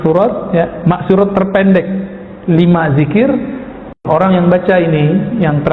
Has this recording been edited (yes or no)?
yes